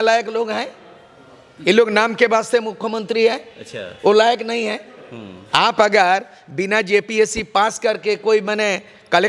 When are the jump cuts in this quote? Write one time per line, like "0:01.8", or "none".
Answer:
none